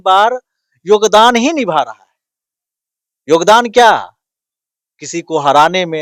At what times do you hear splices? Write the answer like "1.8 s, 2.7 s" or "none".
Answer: none